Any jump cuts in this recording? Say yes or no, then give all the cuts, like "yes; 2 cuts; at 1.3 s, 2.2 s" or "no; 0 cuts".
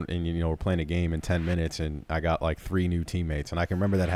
no; 0 cuts